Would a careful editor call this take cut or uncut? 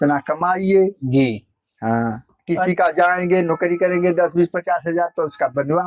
uncut